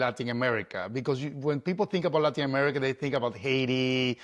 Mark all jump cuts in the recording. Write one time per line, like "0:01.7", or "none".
none

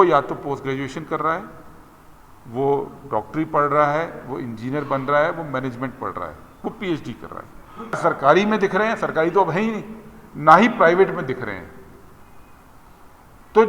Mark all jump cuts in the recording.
0:08.0

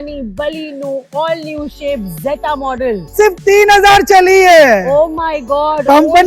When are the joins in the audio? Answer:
0:03.1

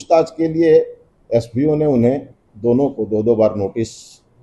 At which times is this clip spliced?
none

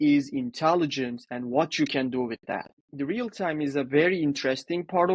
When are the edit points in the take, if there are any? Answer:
0:02.7

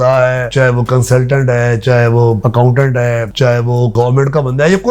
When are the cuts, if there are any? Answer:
0:03.9

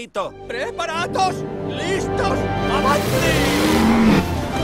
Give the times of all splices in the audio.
0:03.6

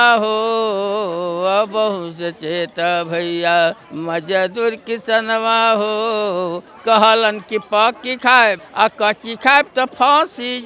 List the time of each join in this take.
0:03.9
0:06.7
0:08.7

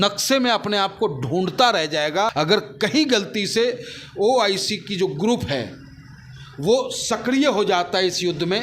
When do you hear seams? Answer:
0:02.3

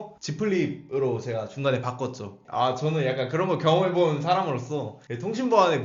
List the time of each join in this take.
none

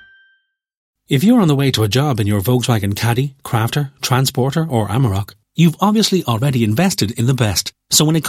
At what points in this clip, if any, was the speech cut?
0:01.0

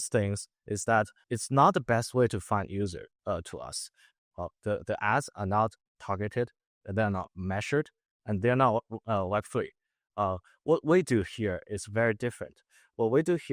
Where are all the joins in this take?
0:01.2

